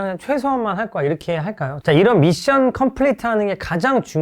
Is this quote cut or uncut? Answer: cut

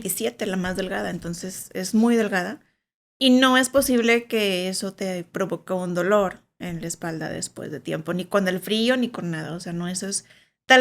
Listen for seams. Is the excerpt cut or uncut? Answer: uncut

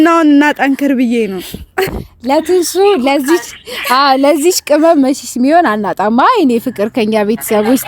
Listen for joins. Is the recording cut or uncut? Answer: uncut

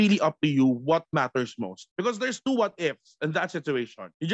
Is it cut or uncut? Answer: cut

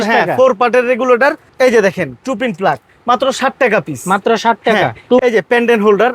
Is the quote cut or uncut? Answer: cut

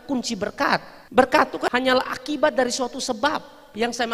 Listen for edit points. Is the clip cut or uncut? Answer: cut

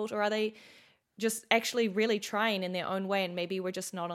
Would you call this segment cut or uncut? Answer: uncut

